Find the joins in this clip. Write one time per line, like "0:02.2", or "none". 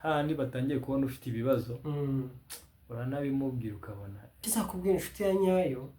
0:04.5